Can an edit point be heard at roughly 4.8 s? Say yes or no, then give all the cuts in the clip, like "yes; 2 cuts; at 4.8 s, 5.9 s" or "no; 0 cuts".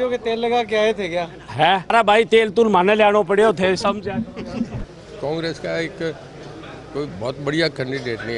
yes; 2 cuts; at 1.9 s, 4.8 s